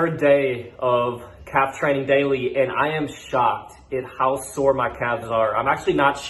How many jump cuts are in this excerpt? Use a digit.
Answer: 0